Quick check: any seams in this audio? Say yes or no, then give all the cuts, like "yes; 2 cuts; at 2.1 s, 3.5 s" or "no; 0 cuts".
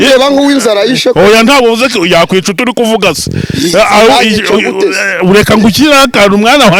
no; 0 cuts